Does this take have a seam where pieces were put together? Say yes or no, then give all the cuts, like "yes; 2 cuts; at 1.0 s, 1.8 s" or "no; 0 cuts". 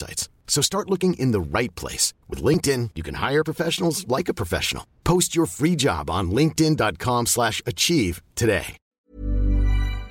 yes; 1 cut; at 8.9 s